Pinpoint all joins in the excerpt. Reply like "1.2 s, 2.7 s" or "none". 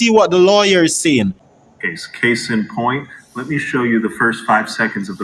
1.4 s